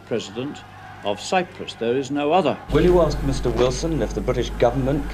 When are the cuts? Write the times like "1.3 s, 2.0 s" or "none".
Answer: 2.6 s